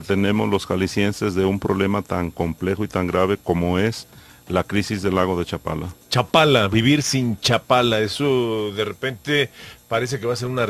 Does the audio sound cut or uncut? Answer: uncut